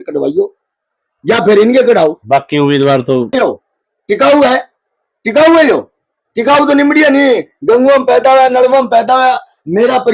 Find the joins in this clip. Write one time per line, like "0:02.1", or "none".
0:03.3